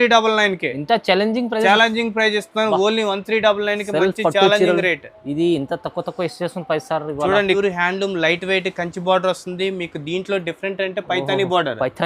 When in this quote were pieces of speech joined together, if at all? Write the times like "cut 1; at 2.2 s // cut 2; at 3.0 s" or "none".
cut 1; at 7.5 s